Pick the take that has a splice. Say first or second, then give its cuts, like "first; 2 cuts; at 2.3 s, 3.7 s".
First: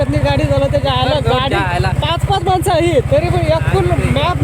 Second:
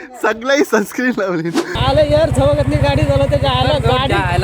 second; 1 cut; at 1.6 s